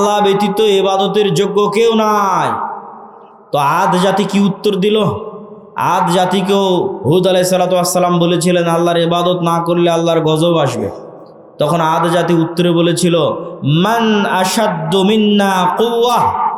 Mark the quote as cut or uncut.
uncut